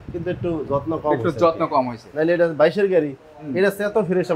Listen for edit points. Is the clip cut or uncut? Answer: uncut